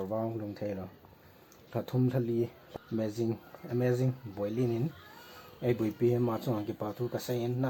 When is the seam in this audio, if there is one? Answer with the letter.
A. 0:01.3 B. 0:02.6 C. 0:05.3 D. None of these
B